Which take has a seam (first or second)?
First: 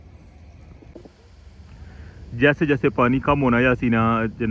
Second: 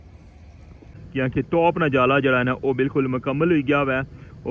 second